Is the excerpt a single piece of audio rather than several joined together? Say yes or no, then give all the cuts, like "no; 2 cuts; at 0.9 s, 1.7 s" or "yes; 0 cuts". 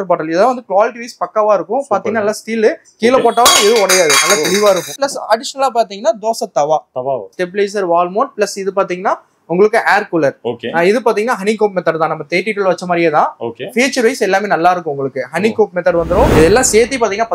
no; 3 cuts; at 4.9 s, 7.3 s, 16.3 s